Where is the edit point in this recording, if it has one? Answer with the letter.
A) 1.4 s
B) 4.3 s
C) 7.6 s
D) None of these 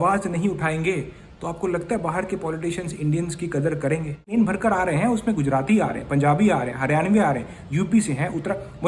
B